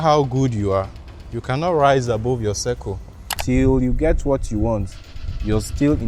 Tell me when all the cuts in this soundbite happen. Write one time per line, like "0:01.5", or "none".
0:03.3